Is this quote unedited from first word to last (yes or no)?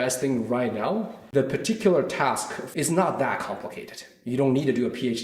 no